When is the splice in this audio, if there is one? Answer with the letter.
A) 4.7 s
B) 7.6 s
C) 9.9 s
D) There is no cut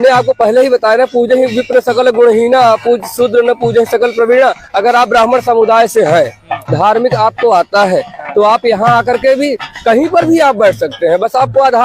D